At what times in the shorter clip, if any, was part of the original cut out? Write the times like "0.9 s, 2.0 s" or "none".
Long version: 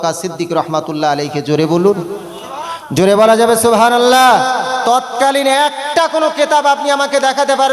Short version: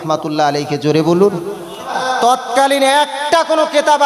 2.0 s